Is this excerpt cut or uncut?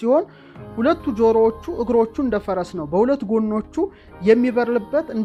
uncut